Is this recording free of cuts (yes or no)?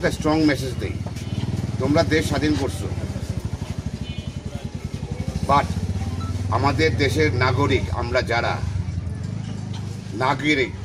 yes